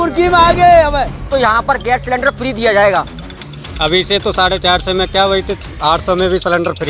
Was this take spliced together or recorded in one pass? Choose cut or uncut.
cut